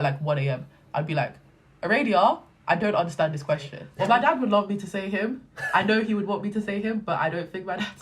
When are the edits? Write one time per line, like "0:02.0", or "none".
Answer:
0:03.8